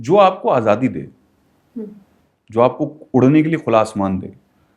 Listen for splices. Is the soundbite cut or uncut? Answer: uncut